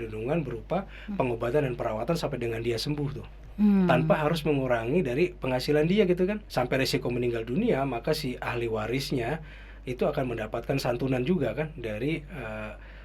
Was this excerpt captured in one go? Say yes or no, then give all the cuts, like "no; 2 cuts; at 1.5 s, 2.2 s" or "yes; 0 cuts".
no; 1 cut; at 6.4 s